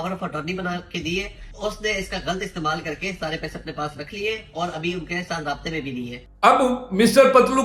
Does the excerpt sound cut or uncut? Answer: cut